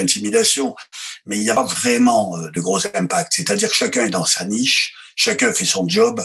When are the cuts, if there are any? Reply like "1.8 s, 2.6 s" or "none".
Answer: none